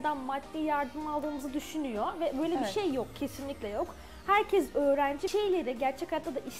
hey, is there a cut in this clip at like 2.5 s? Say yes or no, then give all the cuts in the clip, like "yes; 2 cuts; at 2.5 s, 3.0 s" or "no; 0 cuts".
no; 1 cut; at 5.3 s